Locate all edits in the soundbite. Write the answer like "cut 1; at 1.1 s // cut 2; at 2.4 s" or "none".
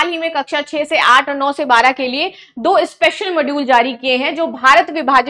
none